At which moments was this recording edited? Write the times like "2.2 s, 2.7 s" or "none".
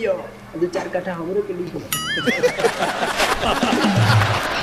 none

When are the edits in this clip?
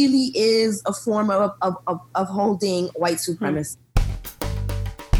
4.1 s

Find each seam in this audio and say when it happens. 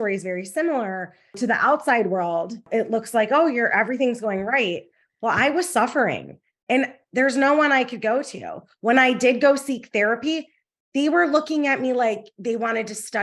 1.4 s, 2.6 s

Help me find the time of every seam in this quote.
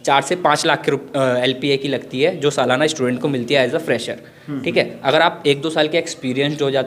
none

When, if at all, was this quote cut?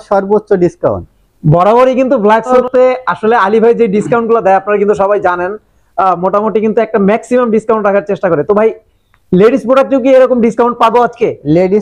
none

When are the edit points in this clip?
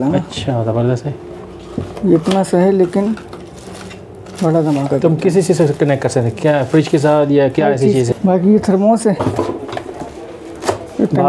8.1 s

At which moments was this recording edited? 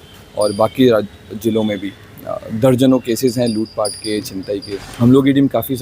4.8 s

